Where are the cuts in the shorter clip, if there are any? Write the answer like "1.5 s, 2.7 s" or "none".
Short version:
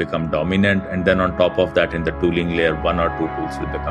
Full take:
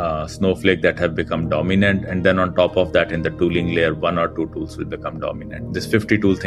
none